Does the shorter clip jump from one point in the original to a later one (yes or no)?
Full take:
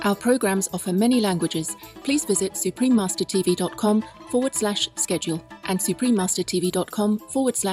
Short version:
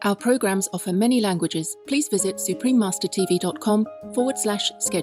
yes